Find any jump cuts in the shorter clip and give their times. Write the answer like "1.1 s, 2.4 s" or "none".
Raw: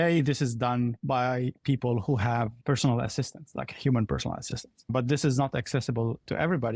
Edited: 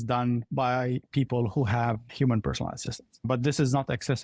2.1 s